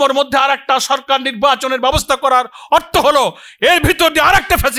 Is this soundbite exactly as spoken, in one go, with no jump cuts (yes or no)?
yes